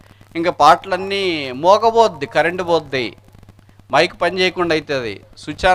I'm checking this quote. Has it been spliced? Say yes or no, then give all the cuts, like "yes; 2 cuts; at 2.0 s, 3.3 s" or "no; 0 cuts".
no; 0 cuts